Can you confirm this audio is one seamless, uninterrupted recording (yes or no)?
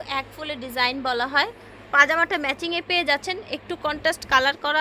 yes